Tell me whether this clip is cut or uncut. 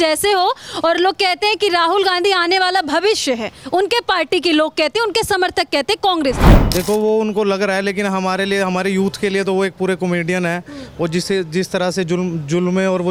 uncut